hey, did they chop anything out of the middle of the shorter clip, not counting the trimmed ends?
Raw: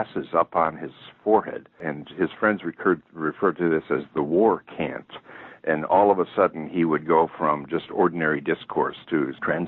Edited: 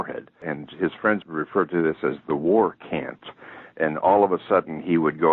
yes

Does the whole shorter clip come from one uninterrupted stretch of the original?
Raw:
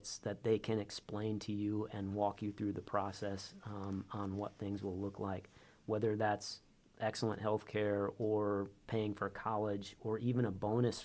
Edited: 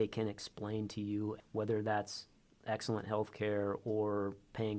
no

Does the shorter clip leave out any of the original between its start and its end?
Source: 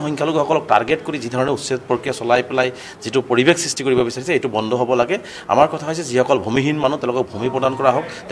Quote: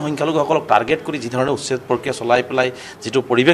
no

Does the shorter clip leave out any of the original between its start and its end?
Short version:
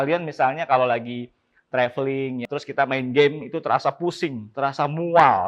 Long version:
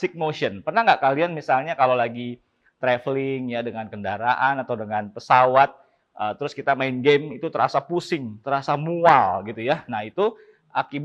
yes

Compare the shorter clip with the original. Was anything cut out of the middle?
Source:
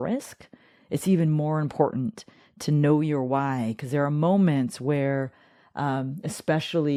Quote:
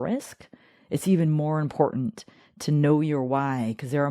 no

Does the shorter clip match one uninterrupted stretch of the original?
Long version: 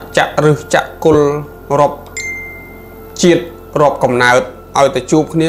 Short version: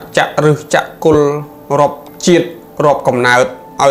no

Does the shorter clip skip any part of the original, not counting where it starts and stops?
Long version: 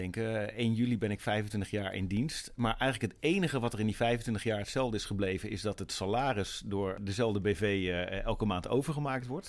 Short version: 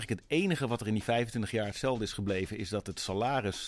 no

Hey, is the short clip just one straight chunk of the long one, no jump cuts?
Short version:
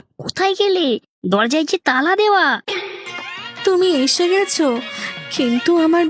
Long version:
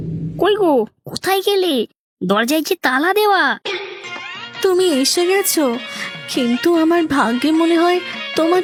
no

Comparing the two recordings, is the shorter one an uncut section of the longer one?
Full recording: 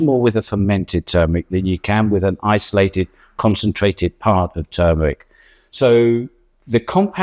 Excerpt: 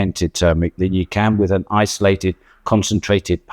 yes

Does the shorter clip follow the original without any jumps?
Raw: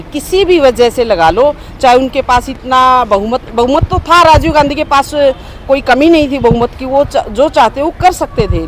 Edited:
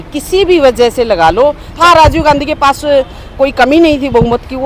no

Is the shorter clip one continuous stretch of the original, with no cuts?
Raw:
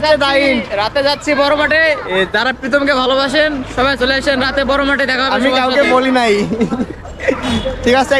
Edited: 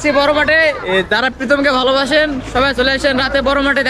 yes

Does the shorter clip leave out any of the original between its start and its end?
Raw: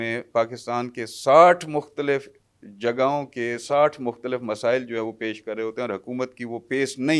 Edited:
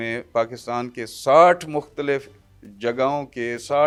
no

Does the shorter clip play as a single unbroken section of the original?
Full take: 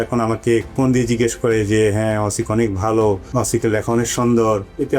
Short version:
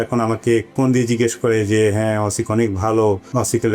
yes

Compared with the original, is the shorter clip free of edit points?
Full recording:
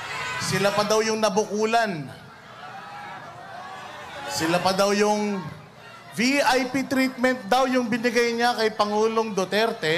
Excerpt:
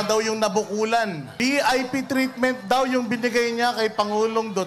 no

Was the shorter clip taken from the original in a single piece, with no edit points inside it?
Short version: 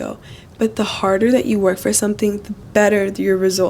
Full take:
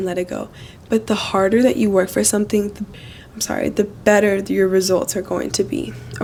no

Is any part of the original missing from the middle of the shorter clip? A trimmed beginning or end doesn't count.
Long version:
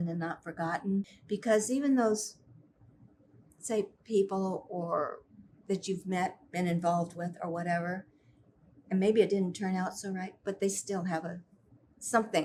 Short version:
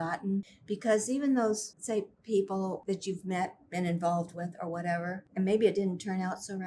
yes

